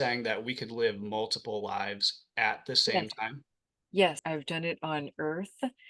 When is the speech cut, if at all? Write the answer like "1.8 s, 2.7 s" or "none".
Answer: 4.2 s